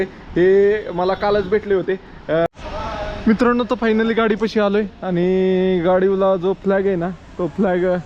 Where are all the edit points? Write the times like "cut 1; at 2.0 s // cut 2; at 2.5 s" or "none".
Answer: cut 1; at 2.5 s